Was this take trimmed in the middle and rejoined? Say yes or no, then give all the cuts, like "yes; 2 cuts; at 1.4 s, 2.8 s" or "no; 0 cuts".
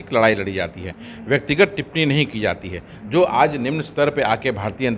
no; 0 cuts